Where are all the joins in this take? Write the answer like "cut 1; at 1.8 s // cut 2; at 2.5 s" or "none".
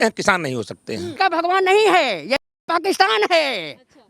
cut 1; at 1.1 s